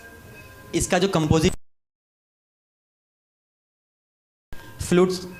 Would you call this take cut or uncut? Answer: uncut